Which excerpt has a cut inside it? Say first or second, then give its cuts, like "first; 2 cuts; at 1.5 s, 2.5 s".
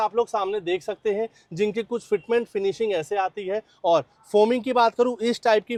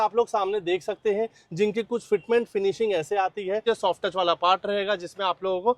second; 1 cut; at 3.6 s